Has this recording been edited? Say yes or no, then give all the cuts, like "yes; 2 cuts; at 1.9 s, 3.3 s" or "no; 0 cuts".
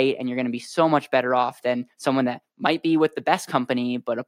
no; 0 cuts